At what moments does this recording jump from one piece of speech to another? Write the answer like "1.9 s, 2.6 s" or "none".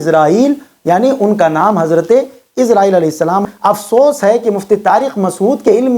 3.4 s